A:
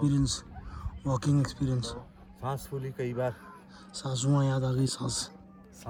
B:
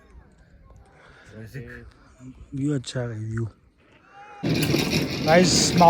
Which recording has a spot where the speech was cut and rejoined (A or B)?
B